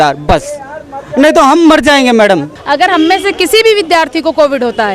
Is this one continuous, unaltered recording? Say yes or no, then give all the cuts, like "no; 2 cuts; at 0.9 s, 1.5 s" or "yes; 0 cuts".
no; 1 cut; at 2.6 s